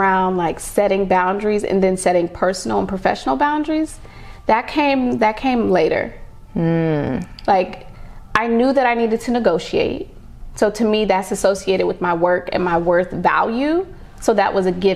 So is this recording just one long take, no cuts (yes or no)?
yes